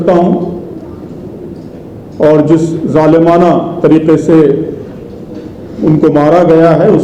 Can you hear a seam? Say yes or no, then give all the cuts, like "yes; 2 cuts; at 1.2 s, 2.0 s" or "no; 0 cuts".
no; 0 cuts